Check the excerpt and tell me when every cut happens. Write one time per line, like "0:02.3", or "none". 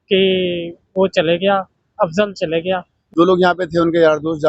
0:02.9